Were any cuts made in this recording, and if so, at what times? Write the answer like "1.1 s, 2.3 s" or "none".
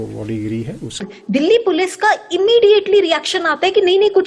1.1 s